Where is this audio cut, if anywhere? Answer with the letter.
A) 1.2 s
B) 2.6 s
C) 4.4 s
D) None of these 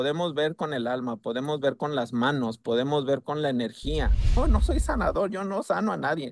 C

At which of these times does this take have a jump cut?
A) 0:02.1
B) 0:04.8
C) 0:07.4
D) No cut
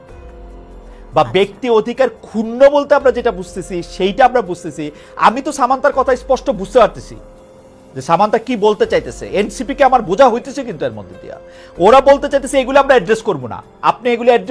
D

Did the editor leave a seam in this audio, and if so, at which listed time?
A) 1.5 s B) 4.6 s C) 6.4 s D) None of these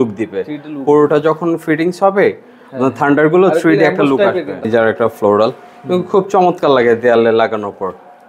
B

